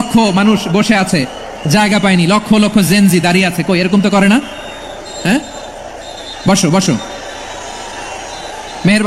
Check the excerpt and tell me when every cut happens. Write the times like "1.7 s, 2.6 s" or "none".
none